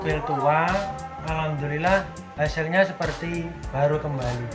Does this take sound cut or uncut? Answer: cut